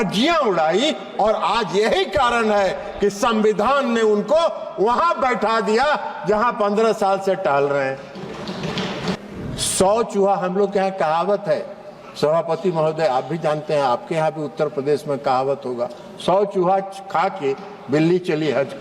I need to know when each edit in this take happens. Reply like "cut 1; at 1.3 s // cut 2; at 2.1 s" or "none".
cut 1; at 9.2 s